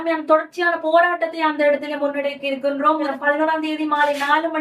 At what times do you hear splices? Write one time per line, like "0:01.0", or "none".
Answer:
0:03.1